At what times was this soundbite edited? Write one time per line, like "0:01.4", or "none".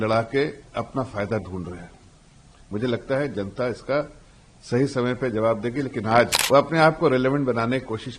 0:06.4